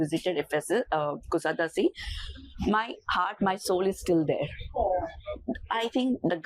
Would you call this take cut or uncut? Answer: uncut